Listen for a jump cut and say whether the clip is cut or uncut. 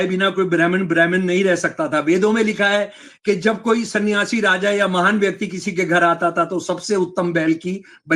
uncut